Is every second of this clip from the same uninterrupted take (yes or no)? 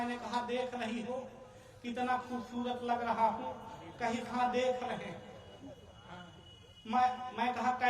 yes